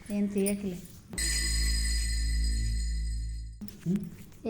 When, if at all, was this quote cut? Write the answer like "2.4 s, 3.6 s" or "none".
3.5 s